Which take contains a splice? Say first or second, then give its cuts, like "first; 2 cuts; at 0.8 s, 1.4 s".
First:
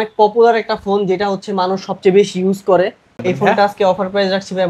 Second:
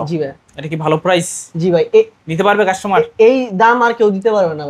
first; 1 cut; at 3.2 s